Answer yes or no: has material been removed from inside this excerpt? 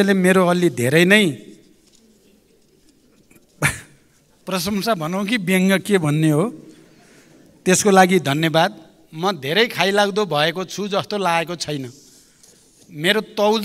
no